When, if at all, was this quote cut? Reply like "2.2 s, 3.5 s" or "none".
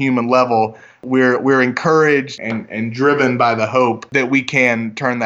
1.0 s, 2.4 s, 4.1 s